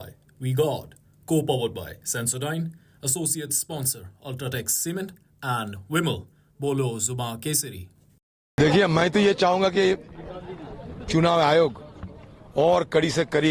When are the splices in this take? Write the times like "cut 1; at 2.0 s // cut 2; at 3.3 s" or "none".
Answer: cut 1; at 8.5 s